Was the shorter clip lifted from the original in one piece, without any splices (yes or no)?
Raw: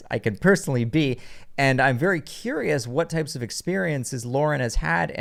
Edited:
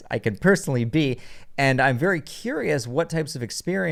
yes